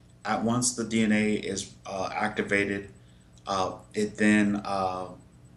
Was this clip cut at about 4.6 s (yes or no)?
yes